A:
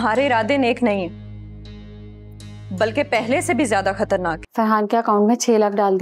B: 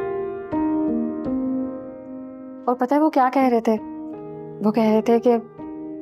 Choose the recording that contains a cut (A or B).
A